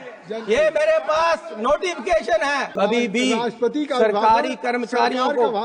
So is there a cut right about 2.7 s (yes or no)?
yes